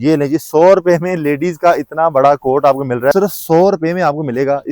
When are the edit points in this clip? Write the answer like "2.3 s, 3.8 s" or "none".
3.1 s

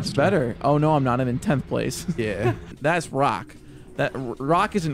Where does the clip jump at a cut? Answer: 2.7 s

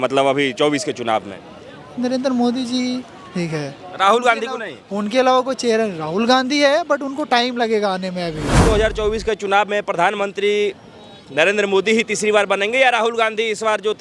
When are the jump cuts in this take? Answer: 8.6 s

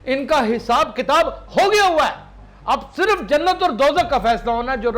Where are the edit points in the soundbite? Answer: none

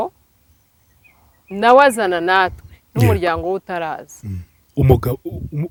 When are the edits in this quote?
none

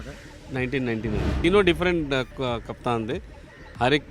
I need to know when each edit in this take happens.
1.4 s

